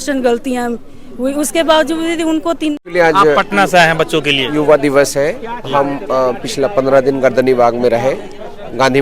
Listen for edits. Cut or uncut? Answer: cut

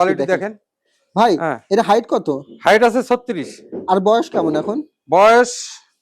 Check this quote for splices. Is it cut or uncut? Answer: uncut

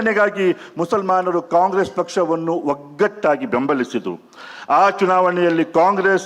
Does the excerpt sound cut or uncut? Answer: uncut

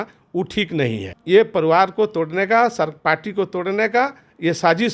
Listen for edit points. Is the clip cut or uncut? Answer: cut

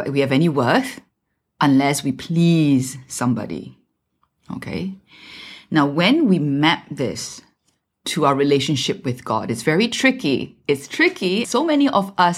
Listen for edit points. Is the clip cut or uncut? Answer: cut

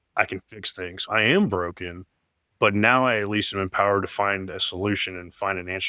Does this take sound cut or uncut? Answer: cut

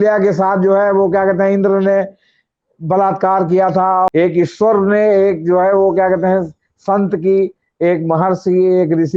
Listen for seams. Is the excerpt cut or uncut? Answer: cut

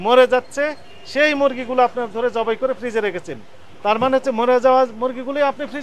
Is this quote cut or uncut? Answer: uncut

